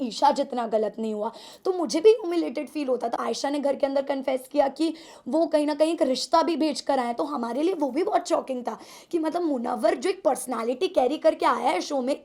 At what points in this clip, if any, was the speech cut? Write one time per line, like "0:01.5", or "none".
0:03.2